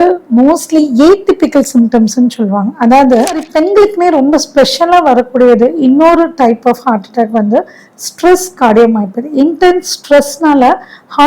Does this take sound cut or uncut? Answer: cut